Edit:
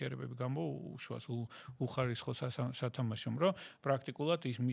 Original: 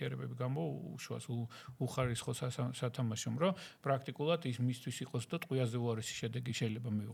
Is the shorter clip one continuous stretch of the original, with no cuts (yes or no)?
yes